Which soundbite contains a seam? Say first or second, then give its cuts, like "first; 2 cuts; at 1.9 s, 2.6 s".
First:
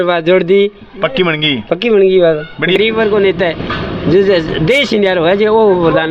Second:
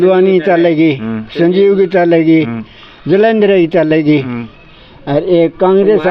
first; 1 cut; at 2.8 s